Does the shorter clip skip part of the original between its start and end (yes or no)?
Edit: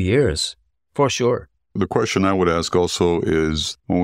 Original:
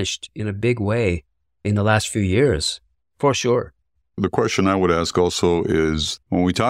yes